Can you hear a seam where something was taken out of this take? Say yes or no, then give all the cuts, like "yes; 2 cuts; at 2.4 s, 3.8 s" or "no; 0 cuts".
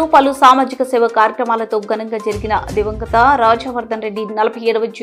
no; 0 cuts